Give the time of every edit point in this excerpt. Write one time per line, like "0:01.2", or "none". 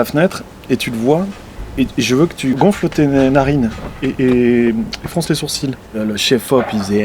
0:02.6
0:06.0